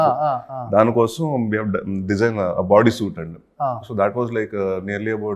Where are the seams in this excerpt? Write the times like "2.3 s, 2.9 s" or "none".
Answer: none